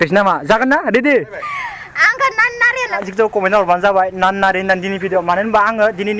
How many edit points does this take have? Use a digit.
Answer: 1